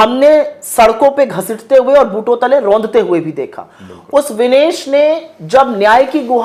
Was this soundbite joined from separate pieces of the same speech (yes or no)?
no